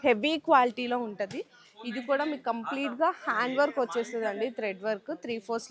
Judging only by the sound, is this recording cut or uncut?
uncut